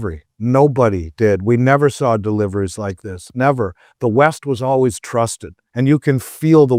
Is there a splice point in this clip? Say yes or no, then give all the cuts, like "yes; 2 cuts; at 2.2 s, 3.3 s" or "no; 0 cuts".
no; 0 cuts